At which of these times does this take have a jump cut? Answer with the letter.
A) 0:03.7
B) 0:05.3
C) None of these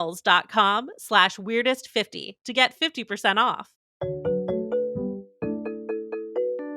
C